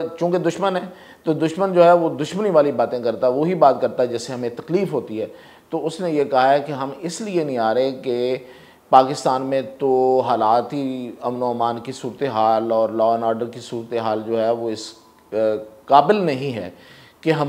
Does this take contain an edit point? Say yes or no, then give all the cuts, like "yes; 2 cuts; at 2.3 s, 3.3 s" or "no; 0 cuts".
no; 0 cuts